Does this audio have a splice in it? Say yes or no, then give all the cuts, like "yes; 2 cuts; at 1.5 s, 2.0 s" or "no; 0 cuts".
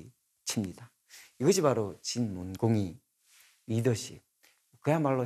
no; 0 cuts